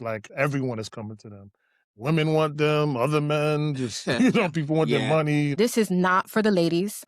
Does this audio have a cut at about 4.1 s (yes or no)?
no